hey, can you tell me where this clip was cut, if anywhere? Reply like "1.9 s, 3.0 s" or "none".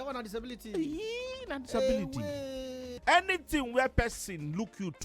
2.9 s

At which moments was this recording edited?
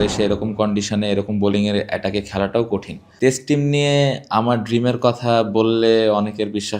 3.0 s

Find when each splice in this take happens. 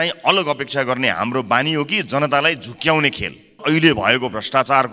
3.6 s

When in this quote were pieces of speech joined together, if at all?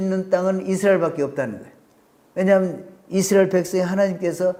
none

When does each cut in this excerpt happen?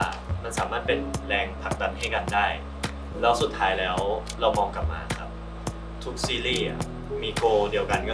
none

